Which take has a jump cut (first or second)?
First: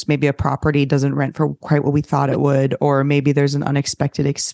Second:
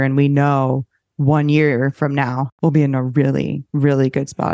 second